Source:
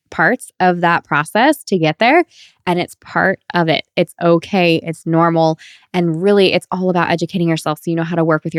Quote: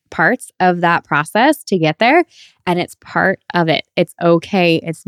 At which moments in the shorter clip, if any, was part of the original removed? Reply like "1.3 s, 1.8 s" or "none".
none